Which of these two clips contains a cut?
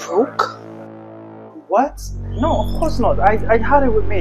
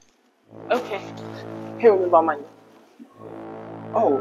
first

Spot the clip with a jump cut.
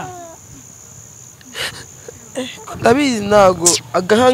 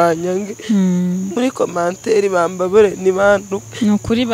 first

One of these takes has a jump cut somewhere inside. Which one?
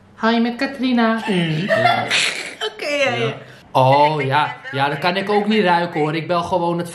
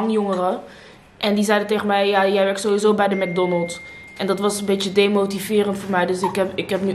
first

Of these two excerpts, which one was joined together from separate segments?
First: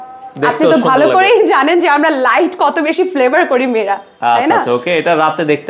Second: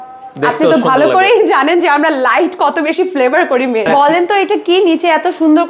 second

